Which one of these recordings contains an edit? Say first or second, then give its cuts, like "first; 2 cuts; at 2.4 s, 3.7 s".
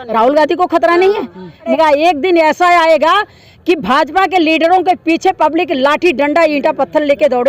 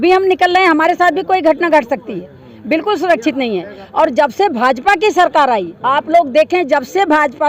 first; 1 cut; at 1.7 s